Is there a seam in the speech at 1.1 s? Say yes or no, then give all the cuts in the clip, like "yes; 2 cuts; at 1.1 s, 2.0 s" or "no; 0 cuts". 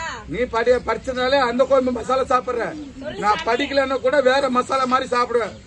no; 0 cuts